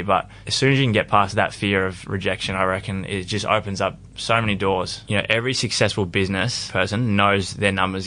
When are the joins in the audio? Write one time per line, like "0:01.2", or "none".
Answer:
0:01.3
0:05.0
0:06.6

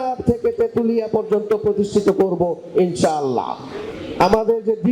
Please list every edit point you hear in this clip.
none

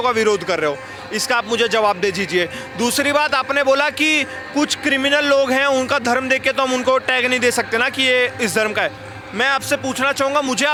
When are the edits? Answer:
none

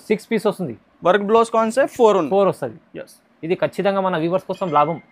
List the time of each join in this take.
none

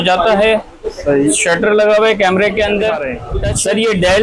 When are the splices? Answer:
0:03.2

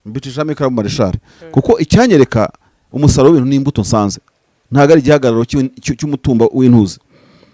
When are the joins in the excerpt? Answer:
none

